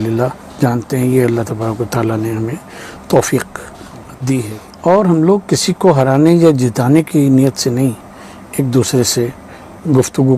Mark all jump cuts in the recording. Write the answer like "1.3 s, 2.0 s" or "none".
4.6 s